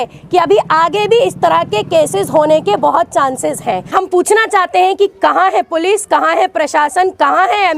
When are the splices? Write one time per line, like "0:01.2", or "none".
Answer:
0:03.9